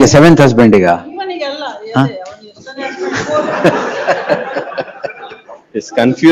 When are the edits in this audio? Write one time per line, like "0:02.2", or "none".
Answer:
none